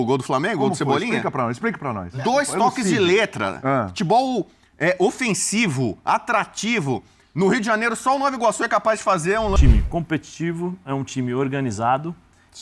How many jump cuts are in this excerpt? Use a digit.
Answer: 1